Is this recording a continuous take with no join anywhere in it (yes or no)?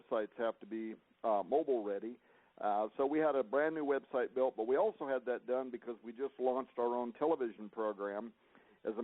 no